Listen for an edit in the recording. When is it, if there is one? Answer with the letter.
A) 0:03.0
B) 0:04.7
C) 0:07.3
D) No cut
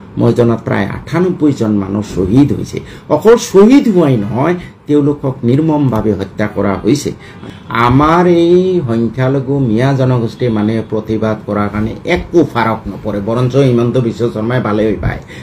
C